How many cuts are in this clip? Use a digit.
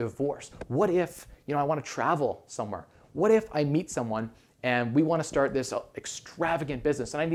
0